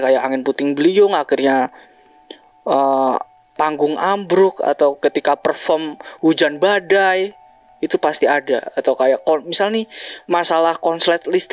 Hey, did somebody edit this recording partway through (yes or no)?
no